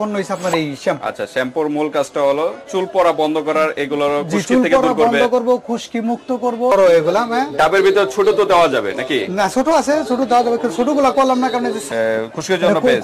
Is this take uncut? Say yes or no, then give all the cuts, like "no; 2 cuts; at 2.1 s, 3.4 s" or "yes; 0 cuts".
no; 2 cuts; at 6.7 s, 11.8 s